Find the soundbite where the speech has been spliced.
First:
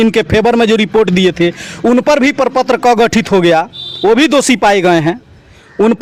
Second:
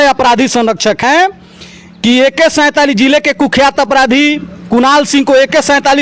second; 1 cut; at 1.0 s

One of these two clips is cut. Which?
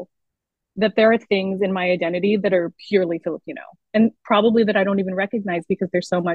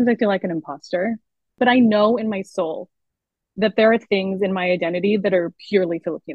second; 1 cut; at 1.5 s

